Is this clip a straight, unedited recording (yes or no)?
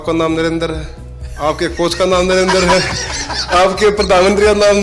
yes